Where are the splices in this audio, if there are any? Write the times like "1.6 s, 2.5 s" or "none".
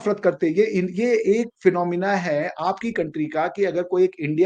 none